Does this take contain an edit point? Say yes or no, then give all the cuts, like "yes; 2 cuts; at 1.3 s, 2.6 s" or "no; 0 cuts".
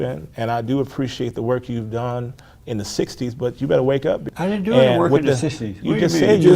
yes; 1 cut; at 4.3 s